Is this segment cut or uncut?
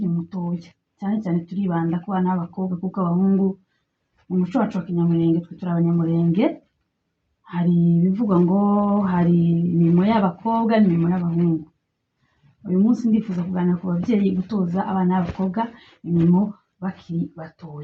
uncut